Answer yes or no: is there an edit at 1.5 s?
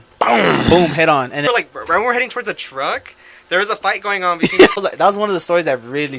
yes